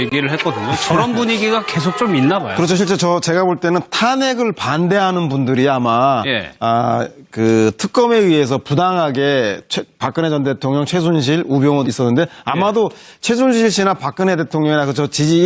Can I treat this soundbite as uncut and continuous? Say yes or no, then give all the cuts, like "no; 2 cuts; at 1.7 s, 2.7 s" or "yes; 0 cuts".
yes; 0 cuts